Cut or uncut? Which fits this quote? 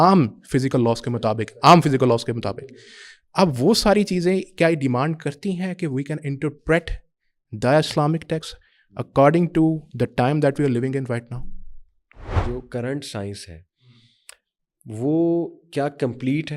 cut